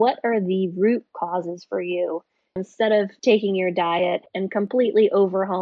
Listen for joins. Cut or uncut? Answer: cut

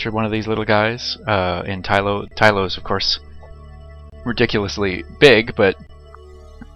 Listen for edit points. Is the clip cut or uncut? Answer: cut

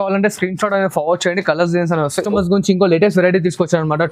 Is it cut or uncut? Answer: cut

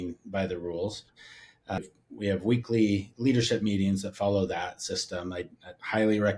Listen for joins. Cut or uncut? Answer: cut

